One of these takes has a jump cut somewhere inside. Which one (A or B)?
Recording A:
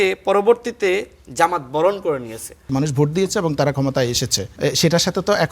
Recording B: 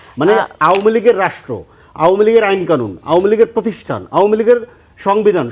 A